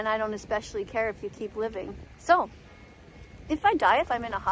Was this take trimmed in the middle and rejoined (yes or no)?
yes